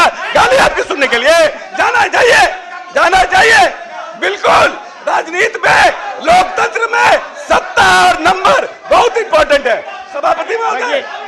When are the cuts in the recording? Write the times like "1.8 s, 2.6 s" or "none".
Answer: none